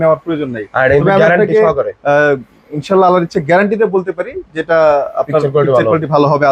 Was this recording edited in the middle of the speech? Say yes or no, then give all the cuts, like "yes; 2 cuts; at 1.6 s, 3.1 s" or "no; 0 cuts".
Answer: no; 0 cuts